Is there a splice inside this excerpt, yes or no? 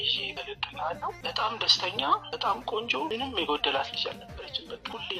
no